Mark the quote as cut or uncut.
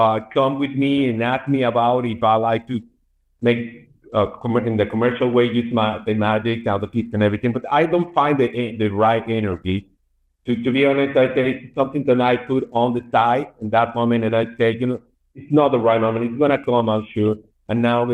uncut